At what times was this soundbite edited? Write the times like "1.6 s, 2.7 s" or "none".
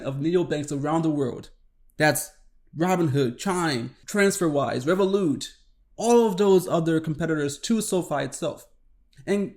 4.0 s